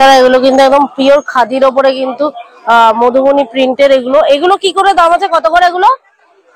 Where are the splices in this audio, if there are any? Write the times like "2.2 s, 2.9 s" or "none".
none